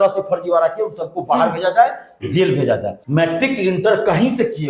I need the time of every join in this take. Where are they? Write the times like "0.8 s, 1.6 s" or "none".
2.9 s